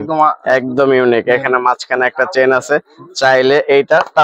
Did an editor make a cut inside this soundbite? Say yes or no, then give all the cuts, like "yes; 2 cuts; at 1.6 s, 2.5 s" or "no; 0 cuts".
no; 0 cuts